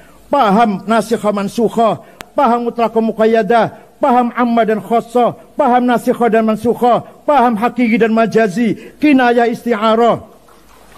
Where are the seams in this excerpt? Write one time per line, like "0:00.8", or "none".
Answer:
0:02.2